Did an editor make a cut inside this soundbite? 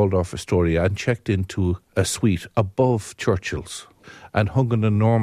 yes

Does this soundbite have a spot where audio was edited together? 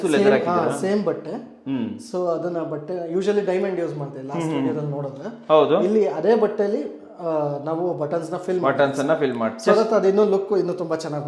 no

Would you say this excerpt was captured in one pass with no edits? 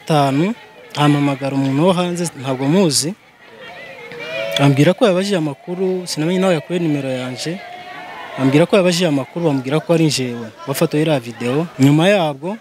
no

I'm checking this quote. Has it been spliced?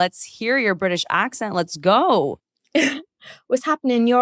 yes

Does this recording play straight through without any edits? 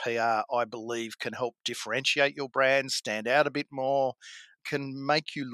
no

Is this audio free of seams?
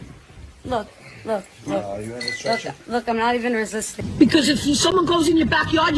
no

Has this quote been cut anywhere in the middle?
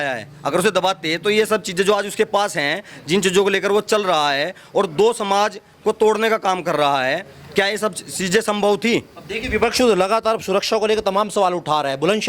no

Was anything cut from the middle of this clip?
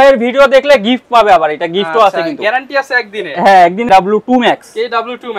yes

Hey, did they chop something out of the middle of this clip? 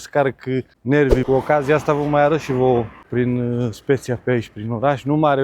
yes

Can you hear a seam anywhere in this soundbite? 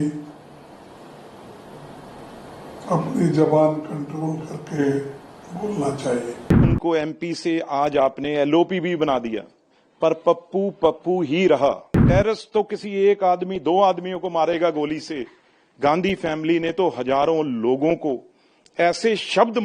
yes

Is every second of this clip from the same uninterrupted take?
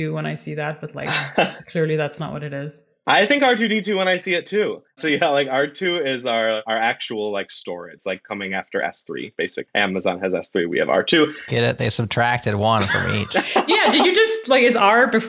no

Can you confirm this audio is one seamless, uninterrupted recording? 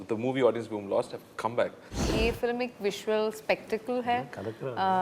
no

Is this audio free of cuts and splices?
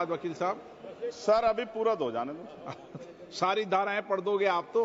yes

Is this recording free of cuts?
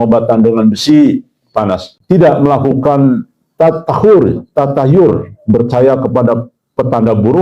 no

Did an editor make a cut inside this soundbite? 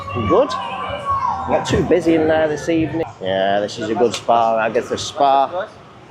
yes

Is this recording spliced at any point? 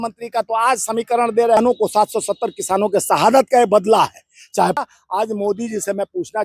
yes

